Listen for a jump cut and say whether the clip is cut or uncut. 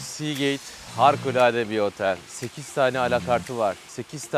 uncut